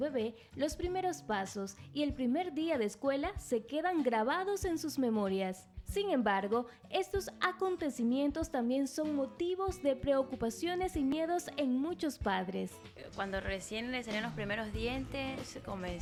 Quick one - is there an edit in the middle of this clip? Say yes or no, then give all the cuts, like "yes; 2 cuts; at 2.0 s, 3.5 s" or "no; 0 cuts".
no; 0 cuts